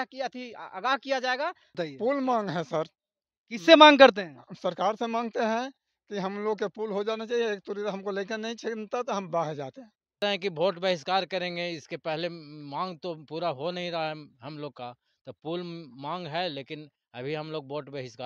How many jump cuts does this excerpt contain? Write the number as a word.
two